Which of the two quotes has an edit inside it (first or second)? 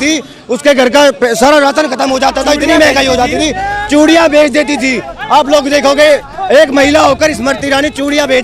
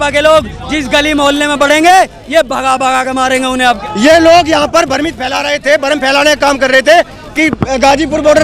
second